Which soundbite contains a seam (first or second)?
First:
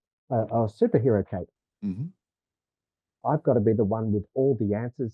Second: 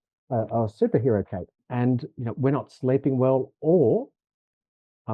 second